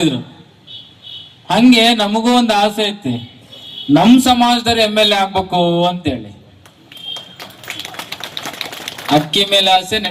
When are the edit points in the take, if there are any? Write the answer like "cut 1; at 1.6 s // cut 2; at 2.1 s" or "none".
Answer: cut 1; at 9.0 s